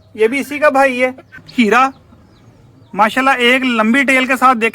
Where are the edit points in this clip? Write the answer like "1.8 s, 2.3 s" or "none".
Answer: 1.3 s